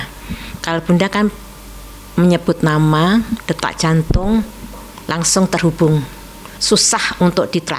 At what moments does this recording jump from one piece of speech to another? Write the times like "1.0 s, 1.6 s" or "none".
none